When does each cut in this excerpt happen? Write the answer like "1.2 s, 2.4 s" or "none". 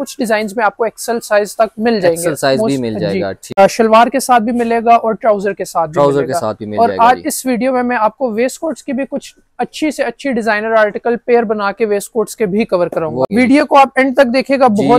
3.6 s, 13.3 s